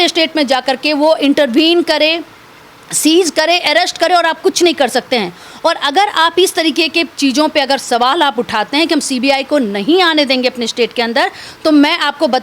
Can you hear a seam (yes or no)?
no